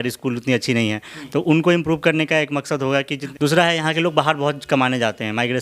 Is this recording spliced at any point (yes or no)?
yes